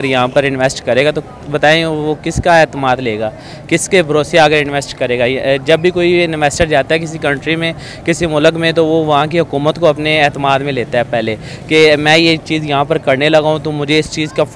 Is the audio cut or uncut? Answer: uncut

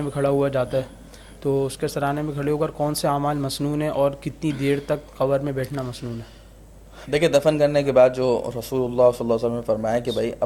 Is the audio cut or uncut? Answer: uncut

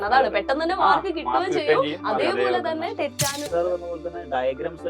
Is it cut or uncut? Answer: cut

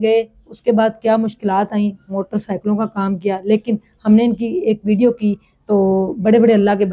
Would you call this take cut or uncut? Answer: uncut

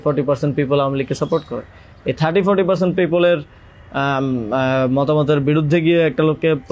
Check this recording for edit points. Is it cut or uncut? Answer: uncut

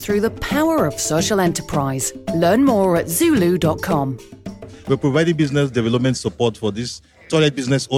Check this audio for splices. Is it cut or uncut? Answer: cut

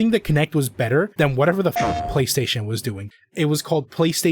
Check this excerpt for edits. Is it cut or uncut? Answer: cut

